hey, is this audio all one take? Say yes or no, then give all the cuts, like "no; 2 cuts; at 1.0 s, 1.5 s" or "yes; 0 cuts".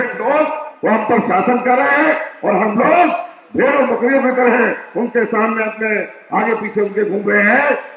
yes; 0 cuts